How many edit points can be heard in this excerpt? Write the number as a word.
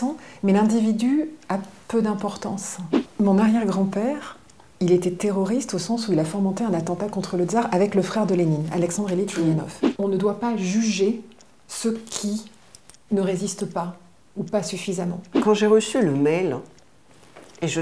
three